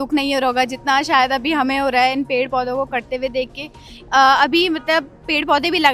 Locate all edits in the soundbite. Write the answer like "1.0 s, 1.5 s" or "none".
none